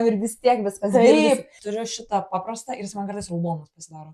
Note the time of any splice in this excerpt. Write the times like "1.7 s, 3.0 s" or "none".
1.6 s

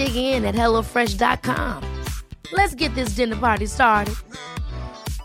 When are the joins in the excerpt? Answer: none

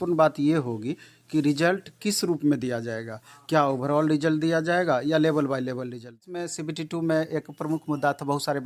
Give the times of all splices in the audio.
6.5 s

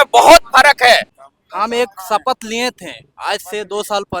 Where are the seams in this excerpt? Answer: 1.2 s

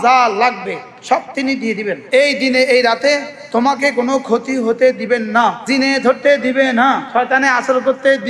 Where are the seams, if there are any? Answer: 2.0 s, 5.6 s, 7.0 s

